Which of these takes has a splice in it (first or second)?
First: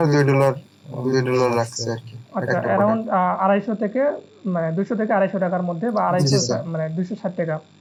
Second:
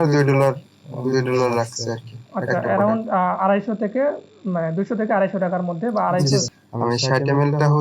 second